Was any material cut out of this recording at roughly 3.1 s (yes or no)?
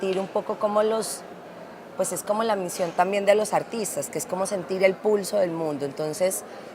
yes